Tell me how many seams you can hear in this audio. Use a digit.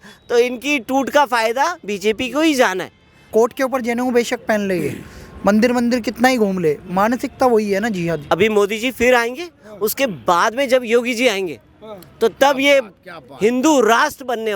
2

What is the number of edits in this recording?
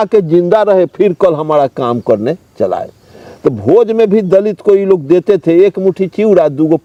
0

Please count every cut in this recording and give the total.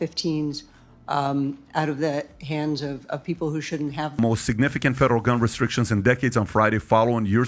1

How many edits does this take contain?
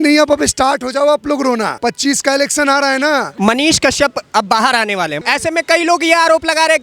3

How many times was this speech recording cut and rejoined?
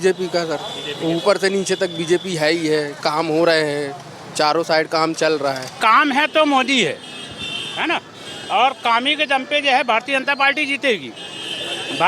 1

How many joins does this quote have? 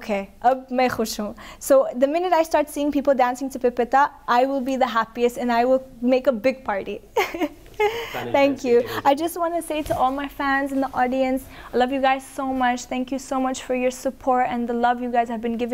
0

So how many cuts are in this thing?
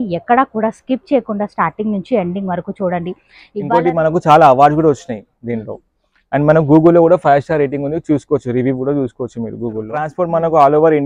2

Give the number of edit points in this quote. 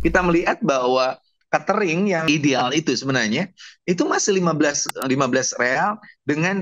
1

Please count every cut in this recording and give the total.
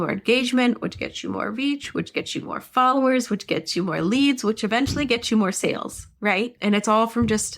1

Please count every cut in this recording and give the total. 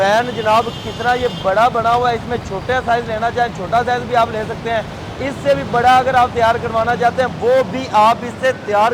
0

